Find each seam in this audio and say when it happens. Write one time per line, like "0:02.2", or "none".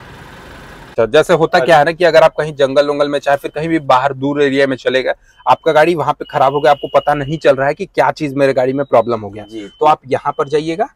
0:00.9